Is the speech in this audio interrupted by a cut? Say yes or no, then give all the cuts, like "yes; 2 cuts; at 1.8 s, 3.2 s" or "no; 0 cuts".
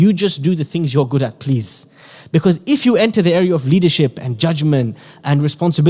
no; 0 cuts